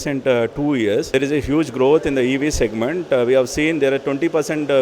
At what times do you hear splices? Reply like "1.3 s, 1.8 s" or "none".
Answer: 1.1 s